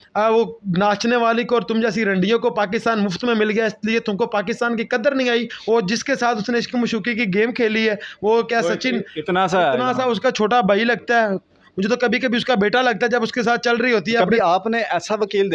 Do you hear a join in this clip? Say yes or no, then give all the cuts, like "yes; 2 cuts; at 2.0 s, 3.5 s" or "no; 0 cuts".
yes; 2 cuts; at 5.5 s, 14.3 s